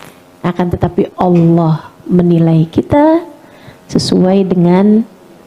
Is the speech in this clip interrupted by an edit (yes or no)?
no